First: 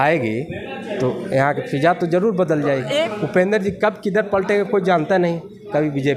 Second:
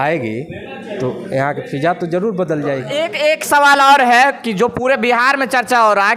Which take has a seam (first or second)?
first